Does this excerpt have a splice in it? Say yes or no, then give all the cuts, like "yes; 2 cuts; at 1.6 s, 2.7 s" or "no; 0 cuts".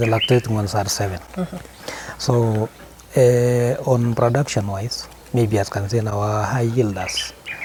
no; 0 cuts